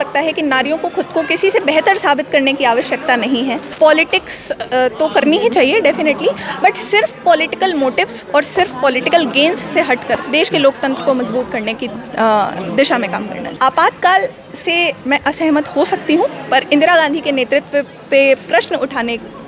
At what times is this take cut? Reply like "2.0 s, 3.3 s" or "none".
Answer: 3.6 s, 13.4 s